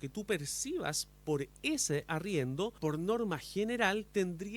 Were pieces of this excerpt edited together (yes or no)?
yes